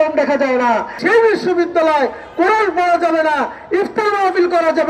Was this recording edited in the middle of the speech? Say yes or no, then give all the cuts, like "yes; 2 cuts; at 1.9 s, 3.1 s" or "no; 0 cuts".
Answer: yes; 1 cut; at 0.9 s